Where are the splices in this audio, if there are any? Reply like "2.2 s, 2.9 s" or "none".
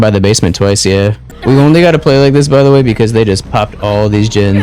1.3 s